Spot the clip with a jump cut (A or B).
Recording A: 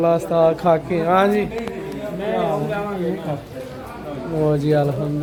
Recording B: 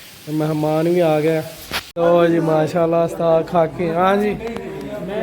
B